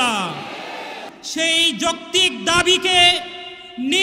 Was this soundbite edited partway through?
yes; 1 cut; at 1.1 s

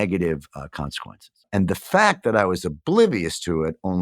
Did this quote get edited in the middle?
no; 0 cuts

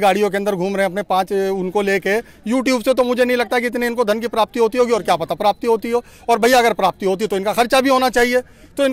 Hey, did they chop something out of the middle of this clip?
no; 0 cuts

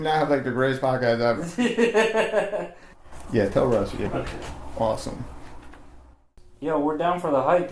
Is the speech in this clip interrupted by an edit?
no; 0 cuts

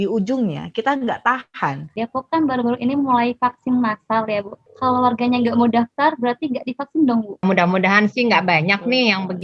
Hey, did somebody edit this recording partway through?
yes; 3 cuts; at 1.9 s, 4.6 s, 7.4 s

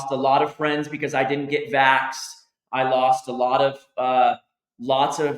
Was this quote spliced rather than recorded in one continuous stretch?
no; 0 cuts

